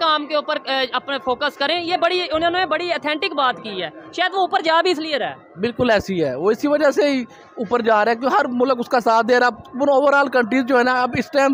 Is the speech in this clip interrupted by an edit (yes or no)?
no